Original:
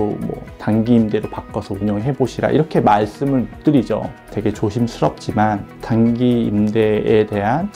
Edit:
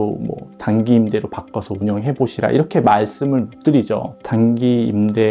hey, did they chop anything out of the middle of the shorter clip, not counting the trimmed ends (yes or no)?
yes